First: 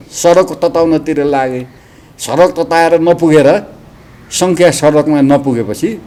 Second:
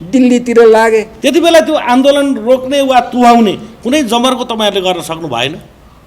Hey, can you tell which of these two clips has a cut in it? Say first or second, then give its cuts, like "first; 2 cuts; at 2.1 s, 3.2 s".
second; 1 cut; at 1.1 s